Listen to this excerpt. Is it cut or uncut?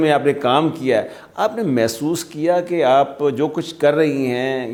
uncut